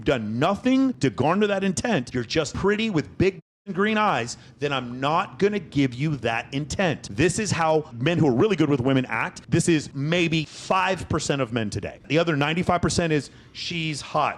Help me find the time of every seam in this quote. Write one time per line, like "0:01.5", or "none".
0:10.2
0:12.1